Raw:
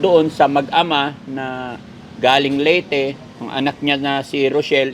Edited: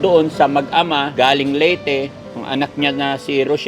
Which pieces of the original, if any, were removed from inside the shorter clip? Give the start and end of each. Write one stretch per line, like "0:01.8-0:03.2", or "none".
0:01.1-0:02.2